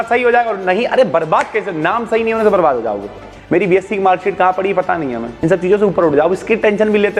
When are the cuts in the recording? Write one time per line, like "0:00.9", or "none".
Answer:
0:03.3
0:05.3